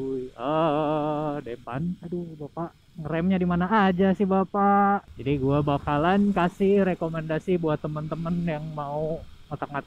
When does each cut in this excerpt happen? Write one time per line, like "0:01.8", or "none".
0:01.7
0:05.1